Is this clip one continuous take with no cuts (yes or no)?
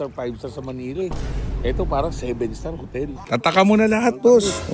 no